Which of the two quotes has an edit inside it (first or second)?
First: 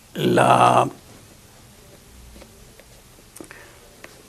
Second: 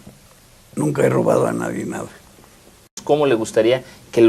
second